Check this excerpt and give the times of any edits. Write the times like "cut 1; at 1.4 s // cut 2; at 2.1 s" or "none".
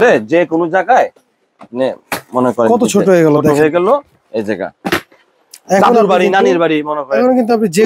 none